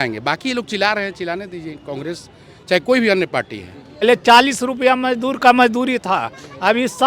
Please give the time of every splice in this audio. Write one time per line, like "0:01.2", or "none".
0:04.0